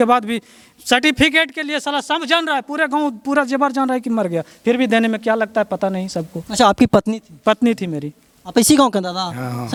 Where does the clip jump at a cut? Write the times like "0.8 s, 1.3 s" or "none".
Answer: none